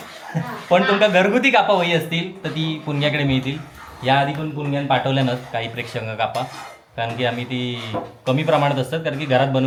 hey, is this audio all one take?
yes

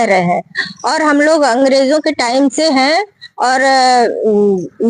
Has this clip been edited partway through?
no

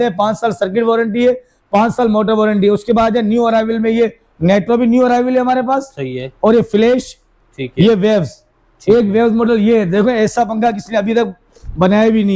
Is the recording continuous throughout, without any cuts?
yes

